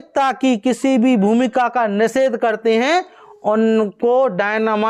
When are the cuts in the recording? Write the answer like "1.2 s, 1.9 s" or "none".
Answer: none